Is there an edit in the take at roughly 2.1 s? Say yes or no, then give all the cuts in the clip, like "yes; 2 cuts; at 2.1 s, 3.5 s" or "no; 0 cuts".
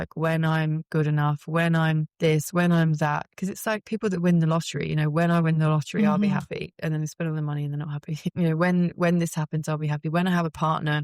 yes; 2 cuts; at 2.1 s, 8.3 s